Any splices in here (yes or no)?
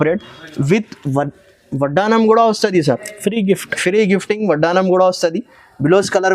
no